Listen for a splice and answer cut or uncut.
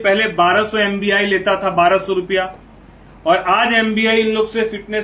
uncut